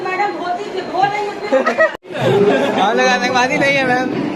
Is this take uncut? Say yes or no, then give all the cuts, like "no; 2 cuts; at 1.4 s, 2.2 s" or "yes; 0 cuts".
no; 1 cut; at 1.9 s